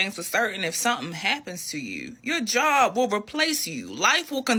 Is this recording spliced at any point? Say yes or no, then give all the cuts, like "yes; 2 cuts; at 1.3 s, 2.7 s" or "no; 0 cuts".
no; 0 cuts